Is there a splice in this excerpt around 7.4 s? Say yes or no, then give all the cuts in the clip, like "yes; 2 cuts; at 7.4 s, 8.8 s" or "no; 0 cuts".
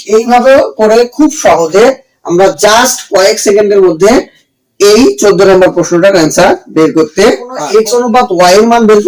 yes; 1 cut; at 7.4 s